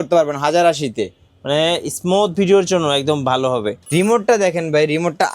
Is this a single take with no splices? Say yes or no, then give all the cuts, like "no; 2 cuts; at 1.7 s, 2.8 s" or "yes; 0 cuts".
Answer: no; 1 cut; at 3.8 s